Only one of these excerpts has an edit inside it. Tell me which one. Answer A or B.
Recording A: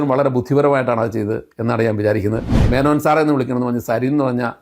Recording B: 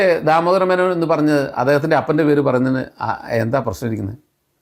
A